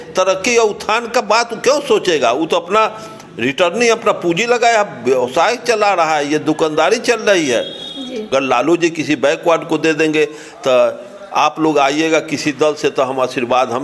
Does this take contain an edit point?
yes; 1 cut; at 8.3 s

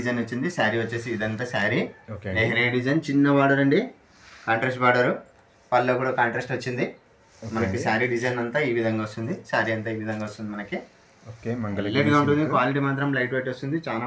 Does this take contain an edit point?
no; 0 cuts

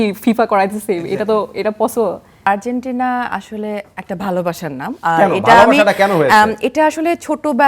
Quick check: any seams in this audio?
yes; 1 cut; at 2.4 s

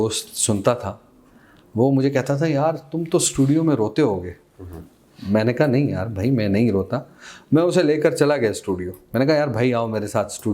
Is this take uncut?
yes; 0 cuts

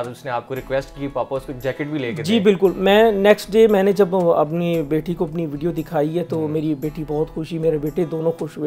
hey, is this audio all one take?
yes; 0 cuts

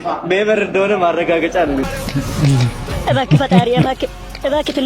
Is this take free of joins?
no; 1 cut; at 1.8 s

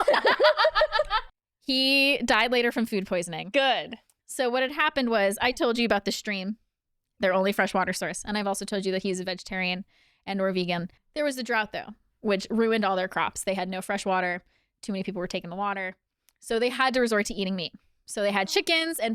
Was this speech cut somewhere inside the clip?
yes; 2 cuts; at 1.2 s, 11.0 s

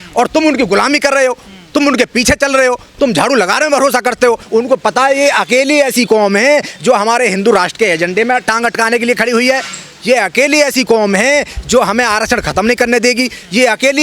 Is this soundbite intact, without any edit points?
no; 1 cut; at 4.4 s

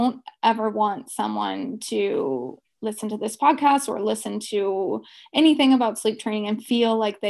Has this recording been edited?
no; 0 cuts

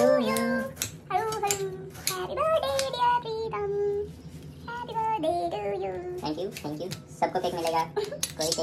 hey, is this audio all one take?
yes; 0 cuts

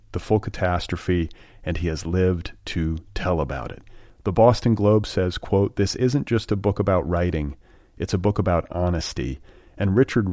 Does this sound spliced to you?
no; 0 cuts

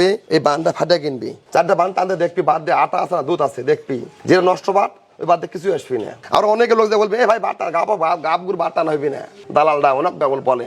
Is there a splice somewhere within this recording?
no; 0 cuts

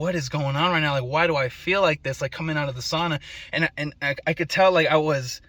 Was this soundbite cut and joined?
no; 0 cuts

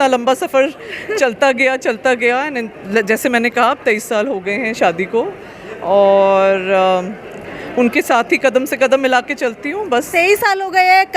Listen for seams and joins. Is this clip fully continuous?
yes; 0 cuts

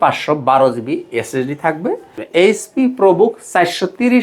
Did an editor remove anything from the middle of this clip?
yes; 1 cut; at 2.1 s

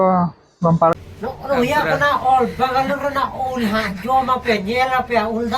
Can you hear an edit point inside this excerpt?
yes; 1 cut; at 0.9 s

